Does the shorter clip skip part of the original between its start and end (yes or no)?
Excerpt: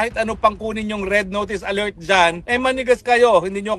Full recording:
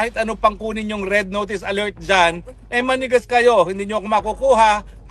yes